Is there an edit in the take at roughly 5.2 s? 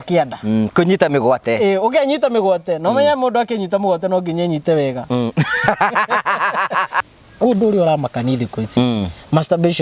no; 1 cut; at 7.0 s

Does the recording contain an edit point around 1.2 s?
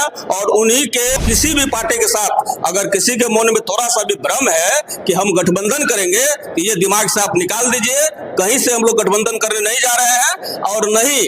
yes; 1 cut; at 1.2 s

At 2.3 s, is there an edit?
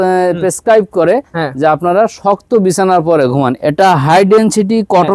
no; 1 cut; at 3.5 s

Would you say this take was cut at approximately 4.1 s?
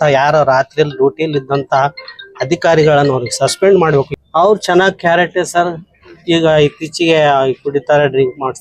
yes; 1 cut; at 4.1 s

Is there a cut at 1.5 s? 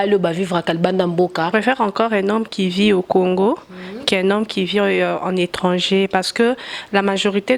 yes; 1 cut; at 1.5 s

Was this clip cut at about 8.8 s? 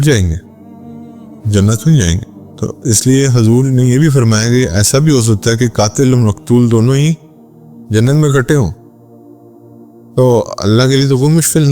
yes; 2 cuts; at 8.8 s, 10.1 s

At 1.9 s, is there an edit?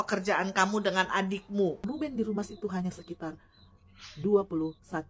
yes; 1 cut; at 1.9 s

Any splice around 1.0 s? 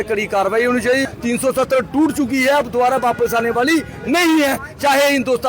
yes; 1 cut; at 1.0 s

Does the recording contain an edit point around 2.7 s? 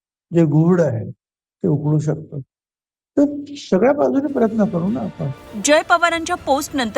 no; 0 cuts

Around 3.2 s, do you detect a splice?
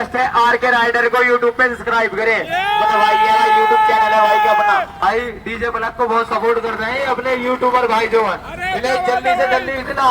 no; 1 cut; at 5.0 s

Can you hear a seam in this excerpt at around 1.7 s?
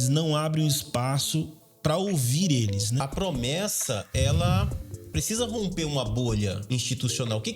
no; 3 cuts; at 3.0 s, 5.1 s, 6.6 s

